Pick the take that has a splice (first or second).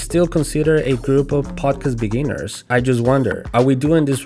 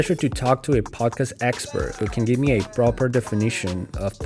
first